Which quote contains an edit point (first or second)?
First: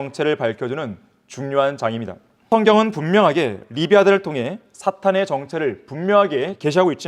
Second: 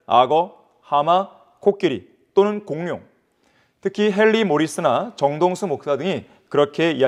first